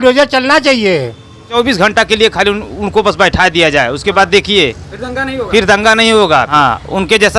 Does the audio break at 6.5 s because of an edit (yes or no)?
yes